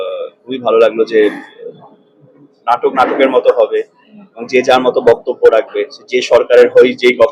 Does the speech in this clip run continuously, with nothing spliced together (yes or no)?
yes